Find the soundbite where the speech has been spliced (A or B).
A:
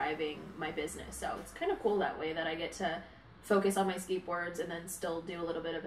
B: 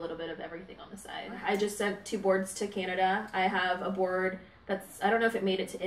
B